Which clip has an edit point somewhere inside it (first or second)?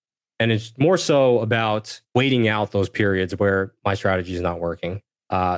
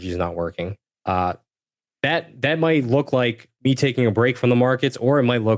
first